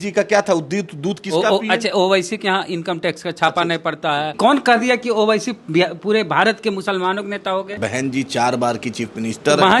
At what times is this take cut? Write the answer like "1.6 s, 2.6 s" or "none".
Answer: 4.3 s, 7.8 s